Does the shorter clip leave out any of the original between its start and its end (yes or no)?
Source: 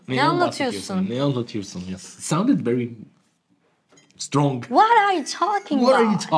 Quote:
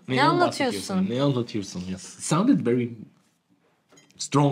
no